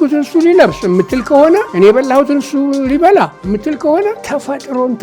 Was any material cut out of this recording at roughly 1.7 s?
yes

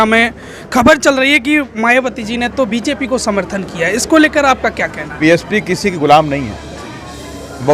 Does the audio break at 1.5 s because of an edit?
no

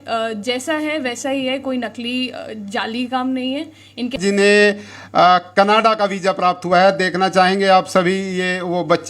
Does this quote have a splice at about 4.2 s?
yes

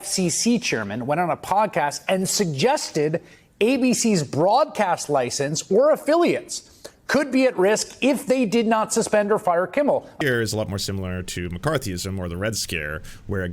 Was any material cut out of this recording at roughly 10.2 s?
yes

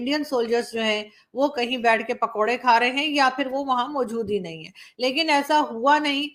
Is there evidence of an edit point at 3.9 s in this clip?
no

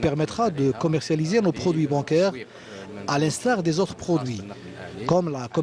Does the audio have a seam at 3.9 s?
no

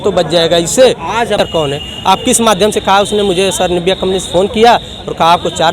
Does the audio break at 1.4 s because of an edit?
yes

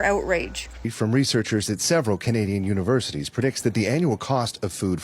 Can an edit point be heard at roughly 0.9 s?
yes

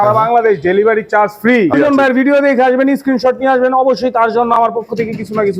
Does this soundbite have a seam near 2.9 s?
no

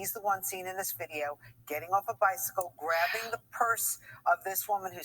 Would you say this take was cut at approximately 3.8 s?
yes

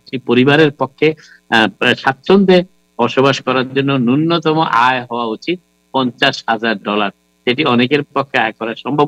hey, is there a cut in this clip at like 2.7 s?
no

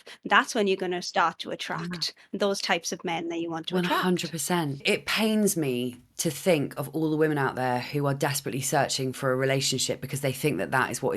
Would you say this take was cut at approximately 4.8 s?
yes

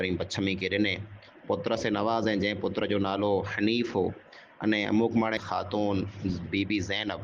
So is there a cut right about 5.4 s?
yes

